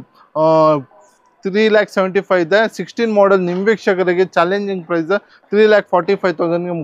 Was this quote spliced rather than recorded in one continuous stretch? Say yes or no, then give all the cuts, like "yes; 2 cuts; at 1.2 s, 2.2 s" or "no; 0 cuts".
no; 0 cuts